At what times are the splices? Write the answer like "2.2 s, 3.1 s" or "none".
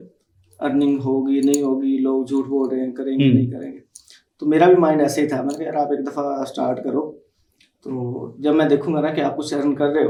none